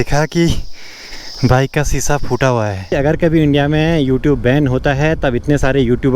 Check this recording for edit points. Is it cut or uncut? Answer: cut